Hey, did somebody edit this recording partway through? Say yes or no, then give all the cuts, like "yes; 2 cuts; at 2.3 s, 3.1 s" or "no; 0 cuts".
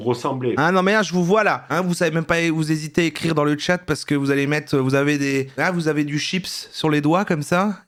no; 0 cuts